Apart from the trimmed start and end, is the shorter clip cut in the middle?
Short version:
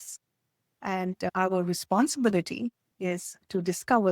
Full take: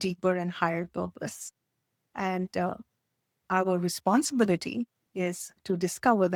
yes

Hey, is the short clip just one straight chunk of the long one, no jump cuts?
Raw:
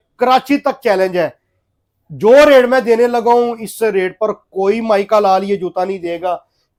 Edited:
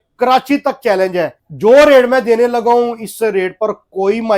no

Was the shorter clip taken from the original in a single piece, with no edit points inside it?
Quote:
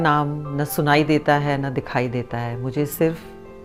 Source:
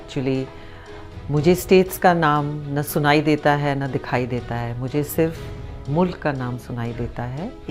yes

